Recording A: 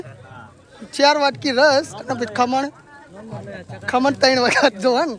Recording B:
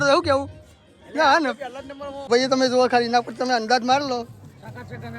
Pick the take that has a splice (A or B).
B